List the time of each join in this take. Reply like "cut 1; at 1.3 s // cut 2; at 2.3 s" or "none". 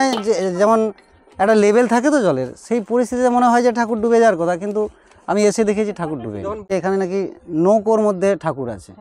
cut 1; at 6.7 s